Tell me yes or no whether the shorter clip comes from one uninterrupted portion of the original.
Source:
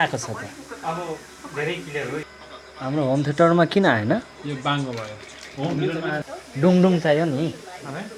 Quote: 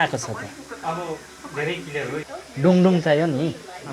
no